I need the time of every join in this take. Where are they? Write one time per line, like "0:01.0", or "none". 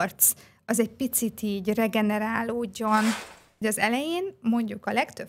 0:03.2